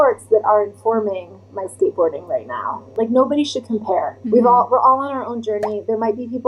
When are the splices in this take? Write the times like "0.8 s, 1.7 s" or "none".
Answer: 2.9 s, 4.2 s